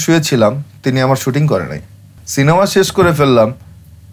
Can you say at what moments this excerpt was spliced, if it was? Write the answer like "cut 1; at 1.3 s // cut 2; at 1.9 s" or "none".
cut 1; at 2.2 s

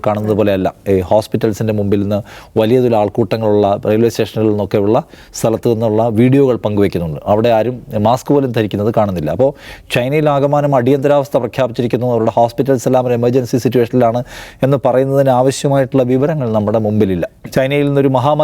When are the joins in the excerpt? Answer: cut 1; at 17.3 s

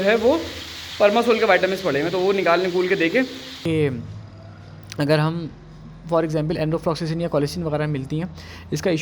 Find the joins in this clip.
cut 1; at 3.6 s

